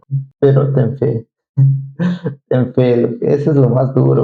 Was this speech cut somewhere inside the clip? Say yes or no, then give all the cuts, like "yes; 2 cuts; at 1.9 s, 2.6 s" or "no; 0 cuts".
no; 0 cuts